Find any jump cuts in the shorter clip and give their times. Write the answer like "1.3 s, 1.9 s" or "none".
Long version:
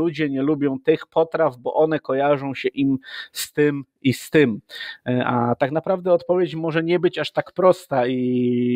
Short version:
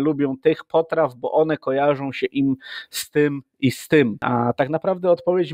4.2 s